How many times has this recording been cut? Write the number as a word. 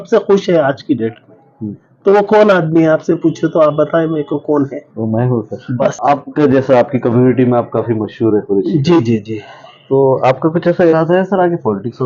one